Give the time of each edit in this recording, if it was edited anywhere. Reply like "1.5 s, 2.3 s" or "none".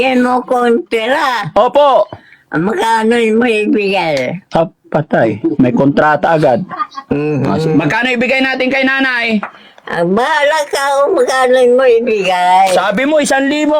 7.0 s